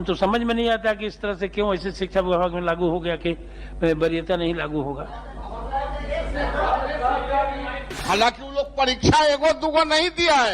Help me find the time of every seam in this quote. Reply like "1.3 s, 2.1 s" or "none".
7.9 s